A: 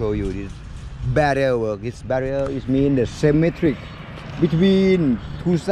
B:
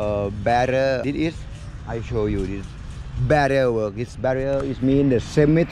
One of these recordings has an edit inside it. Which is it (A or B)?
B